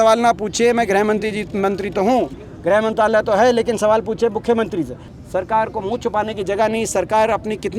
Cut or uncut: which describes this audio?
cut